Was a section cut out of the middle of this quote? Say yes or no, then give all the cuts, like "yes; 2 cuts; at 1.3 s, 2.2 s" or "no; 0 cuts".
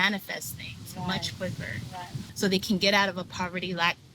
yes; 1 cut; at 2.2 s